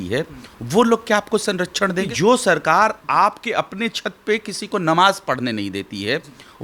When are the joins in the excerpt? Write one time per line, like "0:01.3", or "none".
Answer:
0:02.1